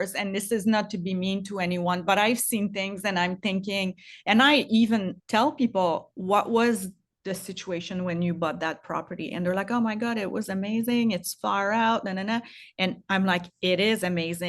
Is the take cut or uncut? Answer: cut